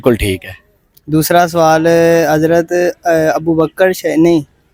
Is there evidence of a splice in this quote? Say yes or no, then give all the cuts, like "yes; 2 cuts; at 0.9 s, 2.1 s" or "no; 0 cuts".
no; 0 cuts